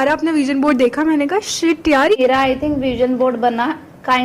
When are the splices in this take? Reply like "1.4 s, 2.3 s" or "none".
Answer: 2.1 s